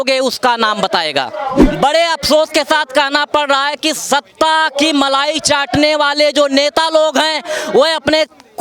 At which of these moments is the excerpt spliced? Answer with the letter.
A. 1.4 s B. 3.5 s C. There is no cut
A